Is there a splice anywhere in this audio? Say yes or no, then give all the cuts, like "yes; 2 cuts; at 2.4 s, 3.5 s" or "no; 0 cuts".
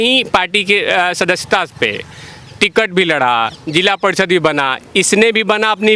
no; 0 cuts